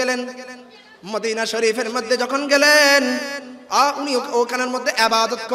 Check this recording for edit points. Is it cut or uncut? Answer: uncut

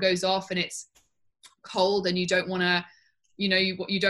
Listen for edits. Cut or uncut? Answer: uncut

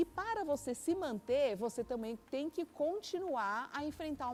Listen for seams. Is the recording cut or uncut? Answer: uncut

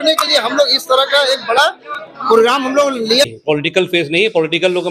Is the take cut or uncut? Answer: cut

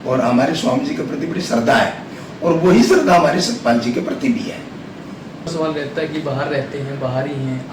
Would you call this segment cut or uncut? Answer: cut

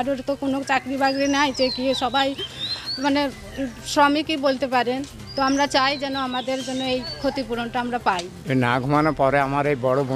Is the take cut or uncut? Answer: cut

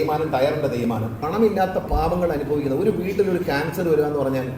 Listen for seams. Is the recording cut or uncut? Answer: cut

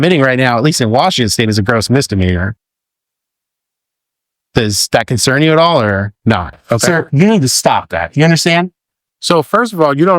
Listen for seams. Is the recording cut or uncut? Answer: cut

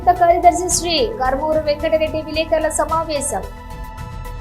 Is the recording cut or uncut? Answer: cut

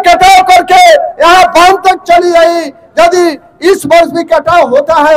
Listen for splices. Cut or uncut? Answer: uncut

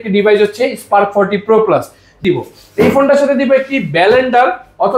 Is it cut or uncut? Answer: cut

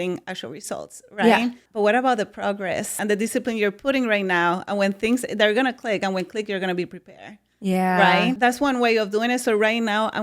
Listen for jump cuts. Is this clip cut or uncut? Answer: cut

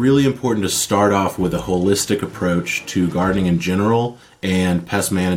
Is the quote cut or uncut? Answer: uncut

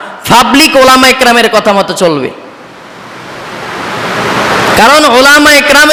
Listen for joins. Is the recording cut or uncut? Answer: uncut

